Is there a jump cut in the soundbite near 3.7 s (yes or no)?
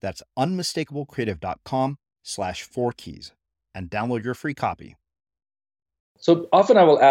no